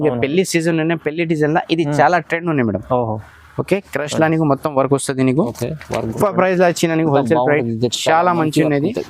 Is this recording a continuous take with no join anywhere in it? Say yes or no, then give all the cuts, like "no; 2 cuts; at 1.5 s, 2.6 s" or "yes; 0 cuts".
no; 1 cut; at 6.1 s